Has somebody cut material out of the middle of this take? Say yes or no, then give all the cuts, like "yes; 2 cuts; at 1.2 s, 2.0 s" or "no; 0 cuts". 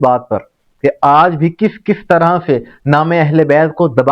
no; 0 cuts